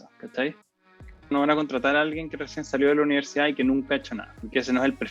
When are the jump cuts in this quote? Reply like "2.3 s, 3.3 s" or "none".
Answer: 1.3 s

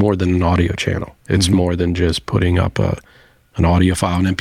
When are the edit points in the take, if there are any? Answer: 1.1 s

